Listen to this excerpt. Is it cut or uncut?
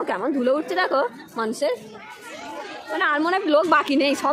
uncut